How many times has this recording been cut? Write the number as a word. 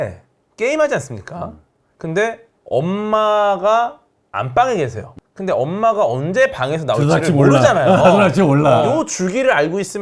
one